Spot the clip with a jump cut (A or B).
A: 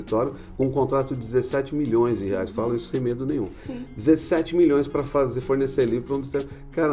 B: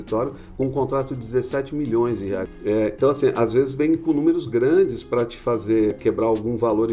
B